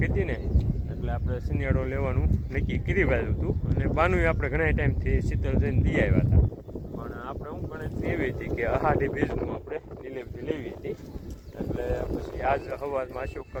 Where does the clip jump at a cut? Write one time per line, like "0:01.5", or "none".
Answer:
none